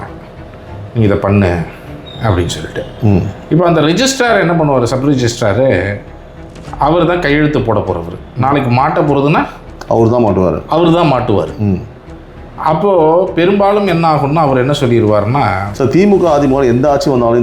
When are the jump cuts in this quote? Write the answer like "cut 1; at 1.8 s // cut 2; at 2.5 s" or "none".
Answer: cut 1; at 15.7 s